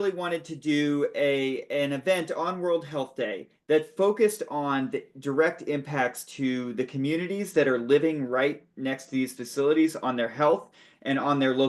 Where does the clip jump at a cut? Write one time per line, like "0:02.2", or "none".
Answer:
none